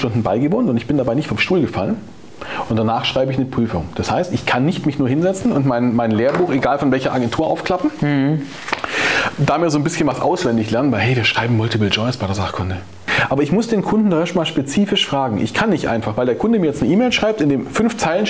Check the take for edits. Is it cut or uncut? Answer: cut